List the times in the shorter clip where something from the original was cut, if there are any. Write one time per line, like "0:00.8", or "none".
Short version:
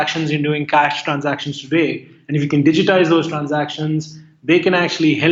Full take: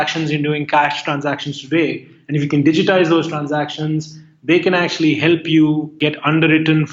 none